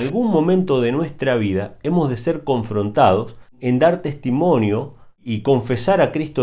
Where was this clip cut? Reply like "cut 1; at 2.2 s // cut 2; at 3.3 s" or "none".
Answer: cut 1; at 3.6 s // cut 2; at 5.3 s